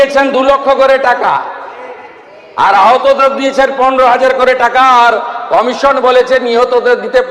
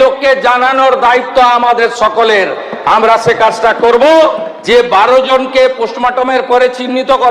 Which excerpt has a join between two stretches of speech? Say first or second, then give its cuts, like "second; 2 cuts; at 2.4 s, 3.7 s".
second; 1 cut; at 4.5 s